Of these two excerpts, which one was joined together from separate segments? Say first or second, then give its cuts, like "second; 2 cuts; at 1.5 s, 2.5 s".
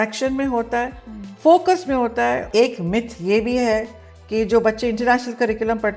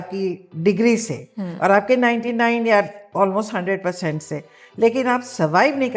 first; 1 cut; at 2.4 s